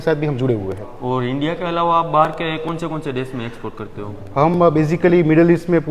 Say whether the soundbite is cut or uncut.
uncut